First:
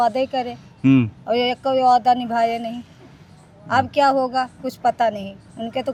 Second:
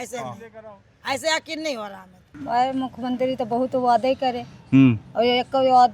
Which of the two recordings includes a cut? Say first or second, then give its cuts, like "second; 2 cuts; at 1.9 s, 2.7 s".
second; 1 cut; at 2.4 s